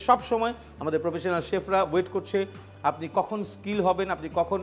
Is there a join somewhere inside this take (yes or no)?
no